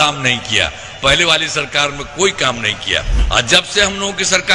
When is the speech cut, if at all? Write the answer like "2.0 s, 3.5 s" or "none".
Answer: 3.1 s